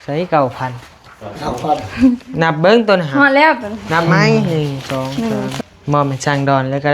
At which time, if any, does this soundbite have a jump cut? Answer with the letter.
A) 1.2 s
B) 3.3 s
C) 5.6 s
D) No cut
C